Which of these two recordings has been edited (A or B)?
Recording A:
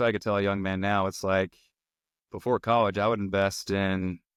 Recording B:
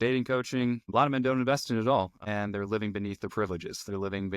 B